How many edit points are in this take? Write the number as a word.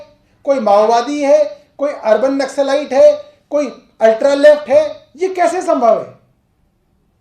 zero